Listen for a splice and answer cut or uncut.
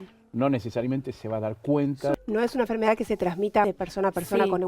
cut